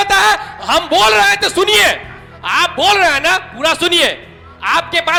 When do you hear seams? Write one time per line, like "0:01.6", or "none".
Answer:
none